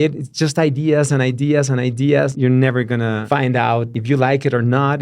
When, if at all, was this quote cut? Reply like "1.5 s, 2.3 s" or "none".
2.3 s, 3.2 s, 3.9 s